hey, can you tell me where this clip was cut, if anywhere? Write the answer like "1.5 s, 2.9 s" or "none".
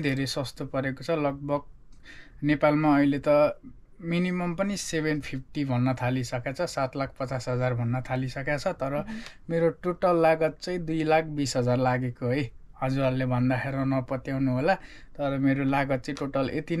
none